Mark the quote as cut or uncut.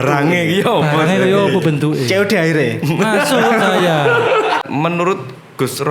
cut